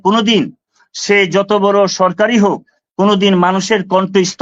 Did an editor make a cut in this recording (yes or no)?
no